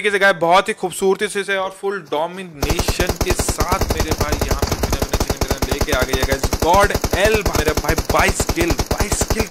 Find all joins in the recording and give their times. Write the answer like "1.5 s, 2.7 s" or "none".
7.5 s